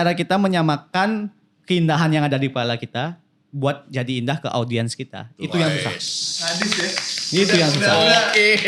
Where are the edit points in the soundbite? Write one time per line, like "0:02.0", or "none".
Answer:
none